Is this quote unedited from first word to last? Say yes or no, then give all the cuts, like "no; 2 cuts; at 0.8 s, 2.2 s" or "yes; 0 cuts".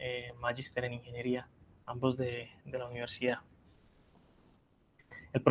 yes; 0 cuts